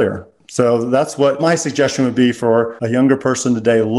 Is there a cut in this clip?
yes; 1 cut; at 2.8 s

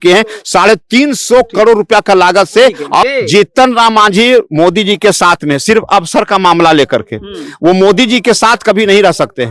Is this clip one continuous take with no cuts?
no; 1 cut; at 3.0 s

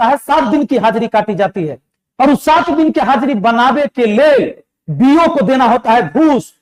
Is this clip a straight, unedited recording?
yes; 0 cuts

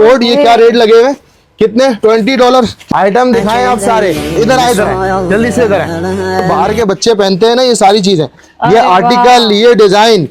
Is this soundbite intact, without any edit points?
no; 3 cuts; at 2.8 s, 4.3 s, 6.4 s

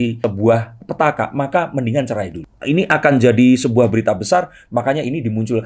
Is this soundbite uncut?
no; 1 cut; at 2.4 s

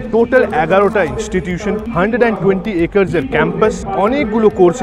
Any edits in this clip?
yes; 2 cuts; at 1.9 s, 3.8 s

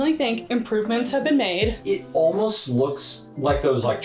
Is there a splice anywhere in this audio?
yes; 1 cut; at 1.8 s

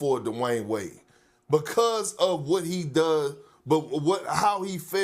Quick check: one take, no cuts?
yes; 0 cuts

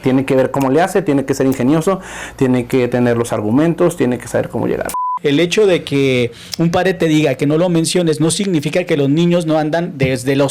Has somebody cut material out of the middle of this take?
yes; 1 cut; at 5.0 s

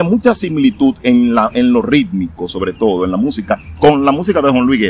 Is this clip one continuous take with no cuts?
yes; 0 cuts

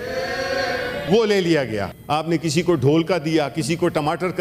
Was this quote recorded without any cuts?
no; 2 cuts; at 1.1 s, 1.9 s

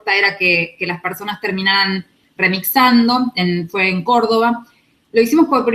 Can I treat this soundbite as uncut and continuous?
no; 1 cut; at 2.0 s

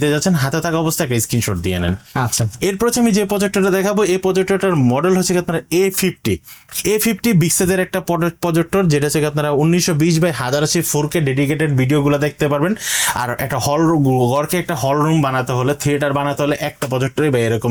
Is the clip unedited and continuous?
yes; 0 cuts

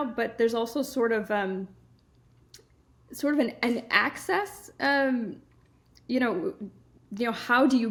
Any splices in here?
no; 0 cuts

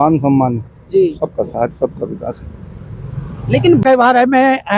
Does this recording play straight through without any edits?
no; 1 cut; at 3.8 s

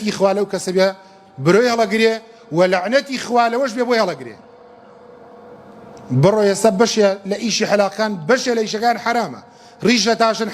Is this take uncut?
yes; 0 cuts

